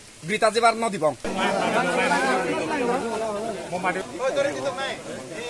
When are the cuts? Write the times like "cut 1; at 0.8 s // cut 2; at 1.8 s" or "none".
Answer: cut 1; at 4.0 s